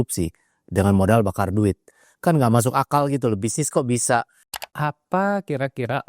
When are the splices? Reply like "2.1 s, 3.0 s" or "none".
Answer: 4.6 s